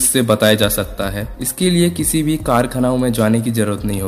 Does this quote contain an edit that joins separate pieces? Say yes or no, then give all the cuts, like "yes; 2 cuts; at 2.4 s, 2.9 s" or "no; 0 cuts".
no; 0 cuts